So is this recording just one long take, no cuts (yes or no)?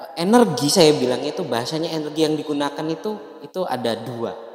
no